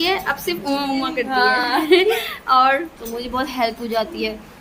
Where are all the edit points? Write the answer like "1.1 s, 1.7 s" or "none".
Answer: none